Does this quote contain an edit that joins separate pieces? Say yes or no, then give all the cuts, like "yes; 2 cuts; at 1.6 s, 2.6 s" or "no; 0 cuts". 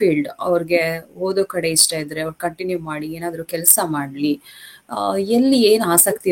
no; 0 cuts